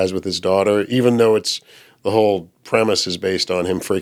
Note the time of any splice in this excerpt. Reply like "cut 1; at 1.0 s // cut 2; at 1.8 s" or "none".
none